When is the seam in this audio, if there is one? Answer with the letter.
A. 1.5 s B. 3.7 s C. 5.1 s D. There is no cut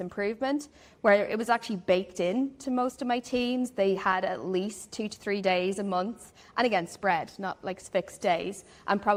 D